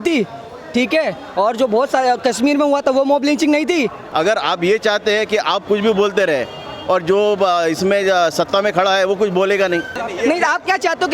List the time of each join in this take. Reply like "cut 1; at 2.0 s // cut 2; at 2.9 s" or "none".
cut 1; at 4.0 s // cut 2; at 10.0 s